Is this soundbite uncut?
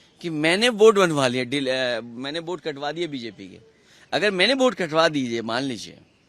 yes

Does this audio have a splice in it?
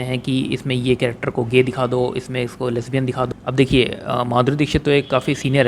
yes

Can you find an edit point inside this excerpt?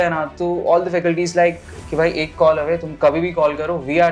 no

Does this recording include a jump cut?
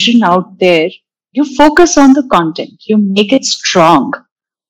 yes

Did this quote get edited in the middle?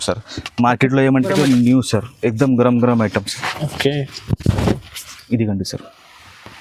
yes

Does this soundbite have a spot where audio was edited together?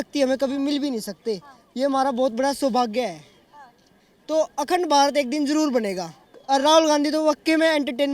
yes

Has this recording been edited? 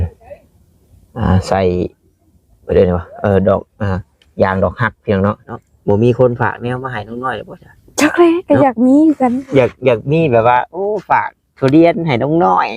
yes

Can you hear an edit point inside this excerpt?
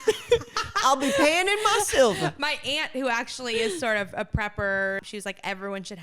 yes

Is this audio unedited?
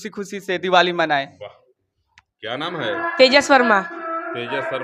yes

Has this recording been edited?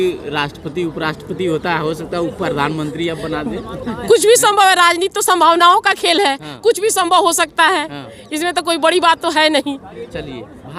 no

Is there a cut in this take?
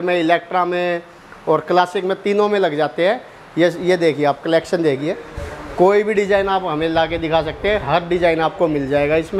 no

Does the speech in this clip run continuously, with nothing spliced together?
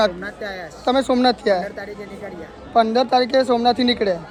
yes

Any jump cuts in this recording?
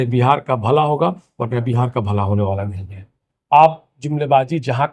no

